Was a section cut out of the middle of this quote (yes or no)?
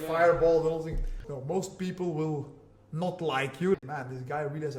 yes